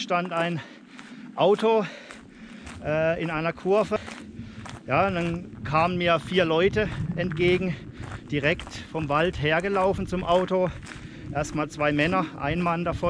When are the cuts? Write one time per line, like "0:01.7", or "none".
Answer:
0:04.0